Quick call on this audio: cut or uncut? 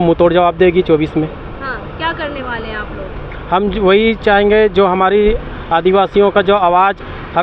uncut